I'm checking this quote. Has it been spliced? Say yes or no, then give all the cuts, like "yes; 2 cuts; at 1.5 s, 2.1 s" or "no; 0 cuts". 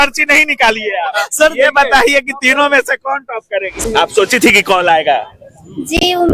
yes; 1 cut; at 3.7 s